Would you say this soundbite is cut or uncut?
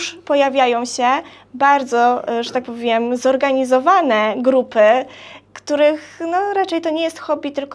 uncut